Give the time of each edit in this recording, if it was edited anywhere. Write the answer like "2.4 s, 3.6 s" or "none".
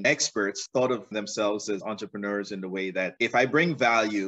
none